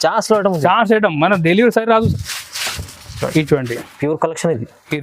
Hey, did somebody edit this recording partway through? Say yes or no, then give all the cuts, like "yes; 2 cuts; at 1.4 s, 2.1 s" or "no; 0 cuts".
yes; 1 cut; at 2.1 s